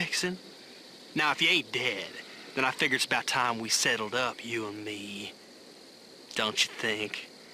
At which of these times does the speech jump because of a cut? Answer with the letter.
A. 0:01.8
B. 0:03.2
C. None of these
B